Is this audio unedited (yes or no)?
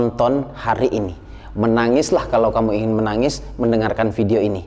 yes